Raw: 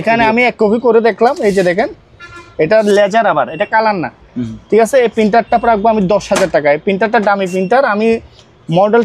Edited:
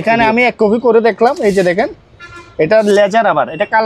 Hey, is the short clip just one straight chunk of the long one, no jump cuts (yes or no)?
yes